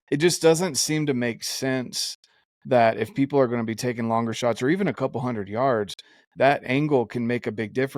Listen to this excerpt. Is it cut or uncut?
uncut